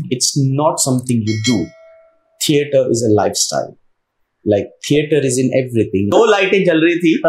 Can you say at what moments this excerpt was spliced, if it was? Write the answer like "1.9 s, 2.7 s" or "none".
6.1 s